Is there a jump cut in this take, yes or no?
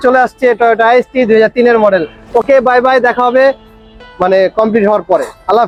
no